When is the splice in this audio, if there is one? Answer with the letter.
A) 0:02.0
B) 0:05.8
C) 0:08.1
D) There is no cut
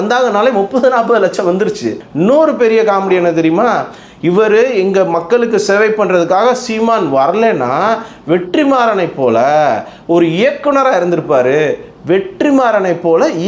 A